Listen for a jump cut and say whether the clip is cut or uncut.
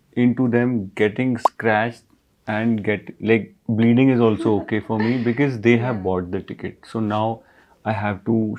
uncut